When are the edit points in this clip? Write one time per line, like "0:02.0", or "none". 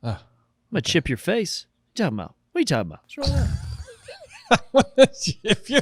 0:03.0